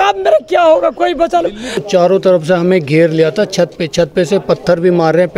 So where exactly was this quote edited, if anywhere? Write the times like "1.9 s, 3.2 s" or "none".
1.8 s